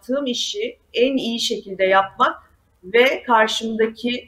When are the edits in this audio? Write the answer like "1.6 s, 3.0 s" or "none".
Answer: none